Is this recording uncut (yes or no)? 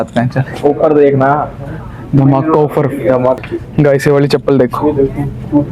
no